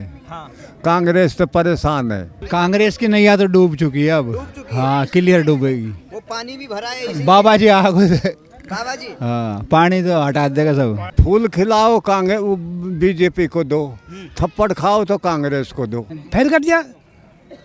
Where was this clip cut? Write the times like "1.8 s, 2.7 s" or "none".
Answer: 2.4 s, 11.1 s, 16.2 s